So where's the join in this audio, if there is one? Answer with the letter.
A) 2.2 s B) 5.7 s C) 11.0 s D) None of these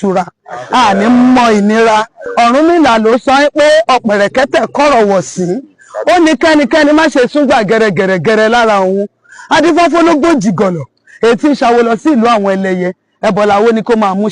A